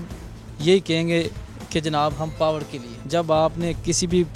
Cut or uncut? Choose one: cut